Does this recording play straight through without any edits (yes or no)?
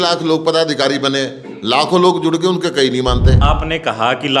no